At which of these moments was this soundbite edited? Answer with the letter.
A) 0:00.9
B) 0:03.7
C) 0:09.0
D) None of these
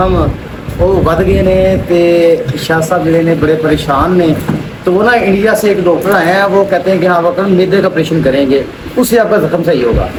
D